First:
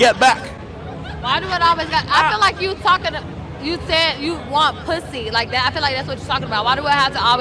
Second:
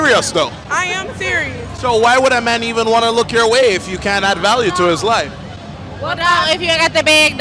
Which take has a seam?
first; 1 cut; at 5.5 s

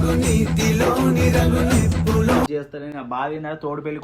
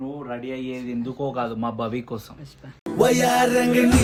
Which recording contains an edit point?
first; 1 cut; at 2.5 s

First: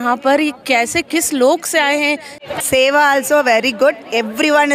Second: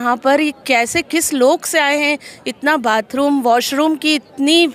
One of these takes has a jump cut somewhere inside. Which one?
first; 1 cut; at 2.5 s

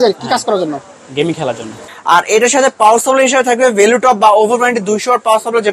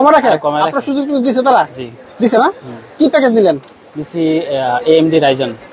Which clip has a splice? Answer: first; 1 cut; at 1.8 s

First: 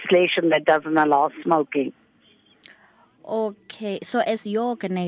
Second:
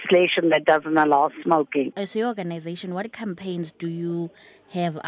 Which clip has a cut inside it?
second; 1 cut; at 1.9 s

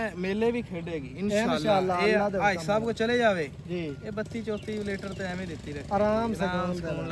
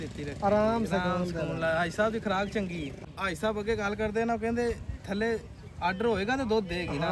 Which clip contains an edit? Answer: second; 1 cut; at 3.0 s

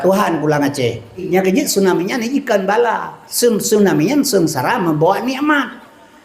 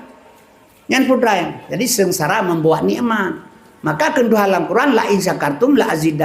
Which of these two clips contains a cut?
first; 1 cut; at 1.2 s

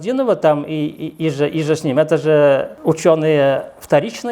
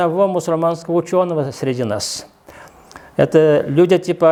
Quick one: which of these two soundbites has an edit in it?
first; 1 cut; at 2.7 s

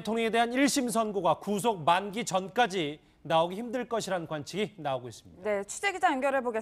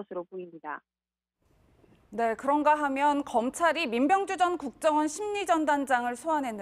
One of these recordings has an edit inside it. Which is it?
second; 1 cut; at 5.1 s

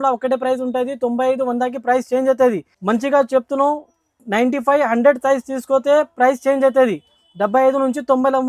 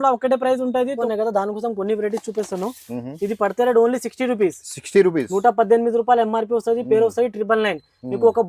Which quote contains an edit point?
second; 1 cut; at 1.0 s

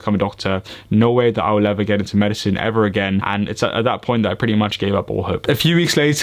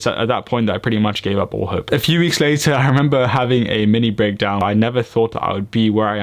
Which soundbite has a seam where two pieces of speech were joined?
second; 1 cut; at 4.6 s

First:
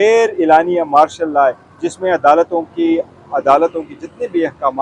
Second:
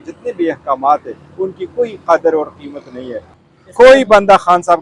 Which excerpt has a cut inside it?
second; 1 cut; at 3.4 s

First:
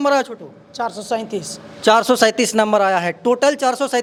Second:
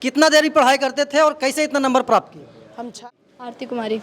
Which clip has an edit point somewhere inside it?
second; 1 cut; at 3.0 s

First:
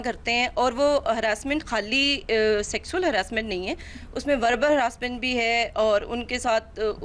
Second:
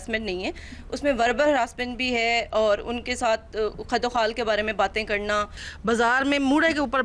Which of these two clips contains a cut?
second; 1 cut; at 5.6 s

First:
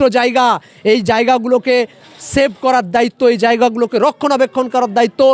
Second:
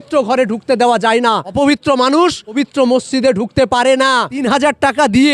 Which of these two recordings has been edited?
second; 3 cuts; at 1.5 s, 2.6 s, 4.4 s

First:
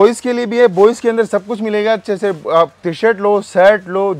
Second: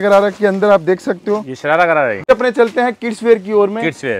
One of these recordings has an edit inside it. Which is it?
second; 1 cut; at 2.2 s

